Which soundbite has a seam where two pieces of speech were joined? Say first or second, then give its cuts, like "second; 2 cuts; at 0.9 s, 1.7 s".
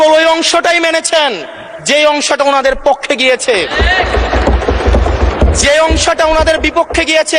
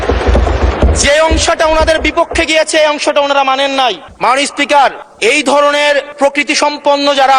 second; 3 cuts; at 4.1 s, 5.1 s, 6.1 s